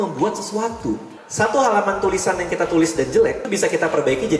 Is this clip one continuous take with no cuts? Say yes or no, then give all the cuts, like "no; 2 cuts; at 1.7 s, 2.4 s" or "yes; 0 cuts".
no; 2 cuts; at 1.2 s, 3.5 s